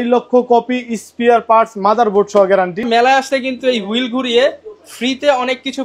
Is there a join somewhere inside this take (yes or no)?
yes